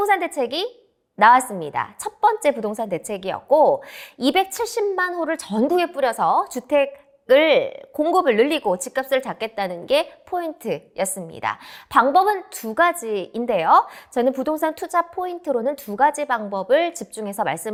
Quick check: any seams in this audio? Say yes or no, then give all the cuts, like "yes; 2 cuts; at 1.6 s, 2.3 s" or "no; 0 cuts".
no; 0 cuts